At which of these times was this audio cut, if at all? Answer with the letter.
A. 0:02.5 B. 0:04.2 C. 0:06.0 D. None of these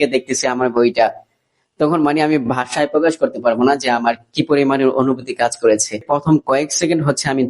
C